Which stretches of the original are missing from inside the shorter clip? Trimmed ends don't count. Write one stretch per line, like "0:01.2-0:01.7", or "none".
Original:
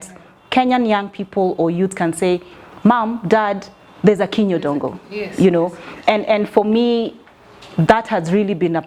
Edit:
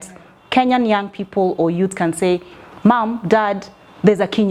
none